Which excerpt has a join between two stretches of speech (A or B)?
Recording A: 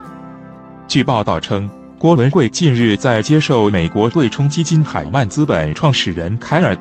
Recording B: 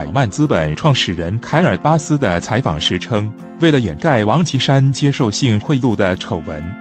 A